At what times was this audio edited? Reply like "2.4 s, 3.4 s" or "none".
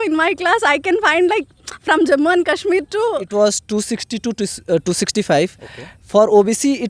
3.2 s